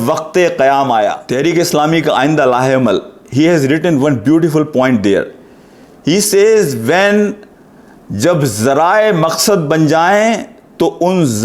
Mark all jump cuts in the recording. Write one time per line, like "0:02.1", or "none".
0:01.2

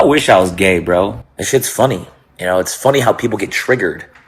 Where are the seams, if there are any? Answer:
0:01.2

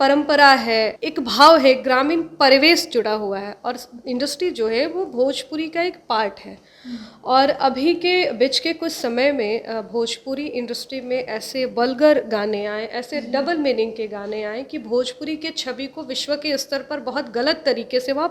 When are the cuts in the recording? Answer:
0:01.0

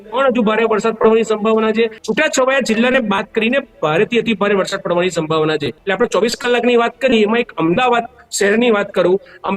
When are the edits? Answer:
0:02.0
0:05.8

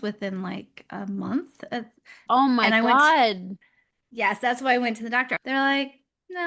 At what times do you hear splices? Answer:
0:02.2
0:05.3

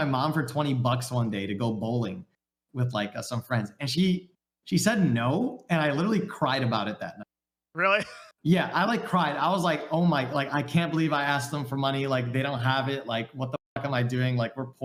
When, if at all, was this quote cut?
none

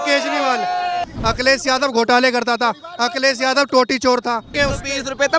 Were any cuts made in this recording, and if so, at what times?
0:01.0
0:04.5

